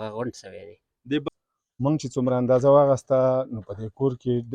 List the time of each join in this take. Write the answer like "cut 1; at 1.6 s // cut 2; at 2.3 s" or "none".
cut 1; at 1.2 s